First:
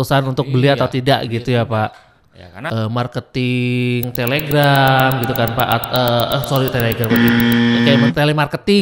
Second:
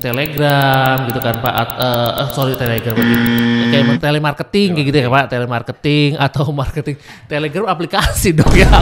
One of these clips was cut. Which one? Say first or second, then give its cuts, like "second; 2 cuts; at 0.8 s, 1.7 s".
first; 1 cut; at 2.7 s